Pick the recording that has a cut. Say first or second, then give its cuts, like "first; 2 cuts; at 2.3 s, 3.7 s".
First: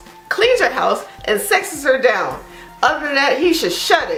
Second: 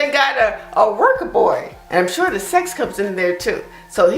second; 1 cut; at 1.7 s